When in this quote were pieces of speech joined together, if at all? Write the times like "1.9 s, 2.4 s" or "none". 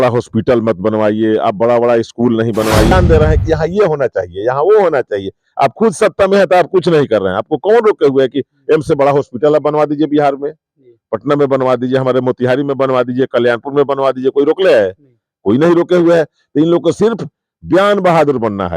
2.9 s